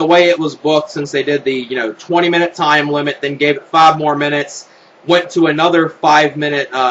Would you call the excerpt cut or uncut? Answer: cut